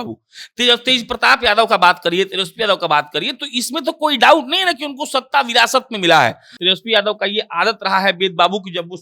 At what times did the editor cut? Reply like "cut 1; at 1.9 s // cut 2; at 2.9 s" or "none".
cut 1; at 6.5 s